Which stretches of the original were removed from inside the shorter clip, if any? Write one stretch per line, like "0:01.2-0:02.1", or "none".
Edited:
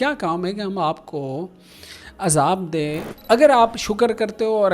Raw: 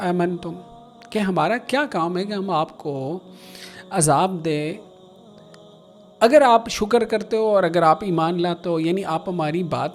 0:04.8-0:06.0

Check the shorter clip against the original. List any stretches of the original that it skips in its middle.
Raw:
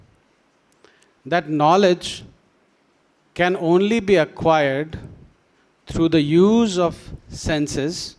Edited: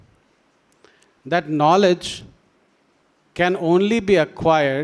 none

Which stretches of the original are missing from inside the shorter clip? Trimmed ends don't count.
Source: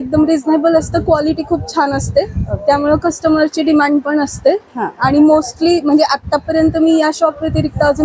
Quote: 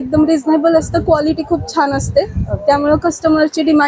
none

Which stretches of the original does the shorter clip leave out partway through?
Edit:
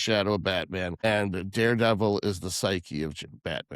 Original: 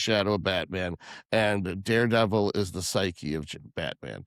0:01.0-0:01.3

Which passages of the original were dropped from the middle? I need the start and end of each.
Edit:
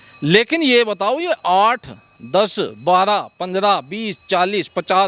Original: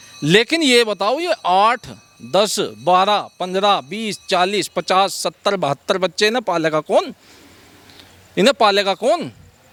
none

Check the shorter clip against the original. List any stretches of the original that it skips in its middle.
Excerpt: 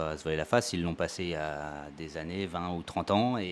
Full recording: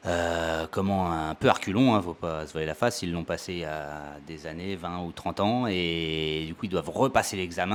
none

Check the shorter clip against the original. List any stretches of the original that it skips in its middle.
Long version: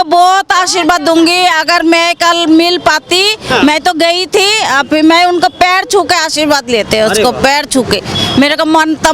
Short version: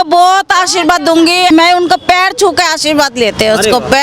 0:01.5-0:05.0

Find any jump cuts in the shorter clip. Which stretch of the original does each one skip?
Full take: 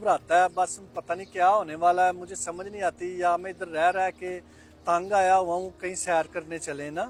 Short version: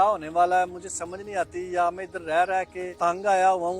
0:04.3-0:04.7

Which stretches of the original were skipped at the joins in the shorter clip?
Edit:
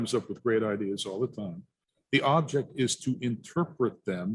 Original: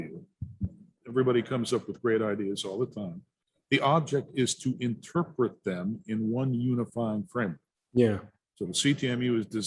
none

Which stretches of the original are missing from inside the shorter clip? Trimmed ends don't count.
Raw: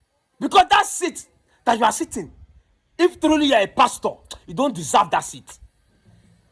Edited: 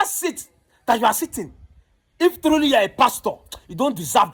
none

